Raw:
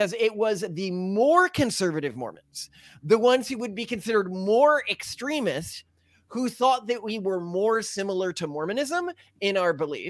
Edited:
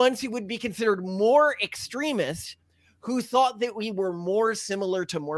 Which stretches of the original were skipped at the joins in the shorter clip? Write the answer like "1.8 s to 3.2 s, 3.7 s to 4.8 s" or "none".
none